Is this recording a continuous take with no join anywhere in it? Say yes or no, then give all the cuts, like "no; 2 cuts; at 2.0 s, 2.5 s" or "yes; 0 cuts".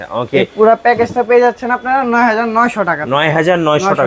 yes; 0 cuts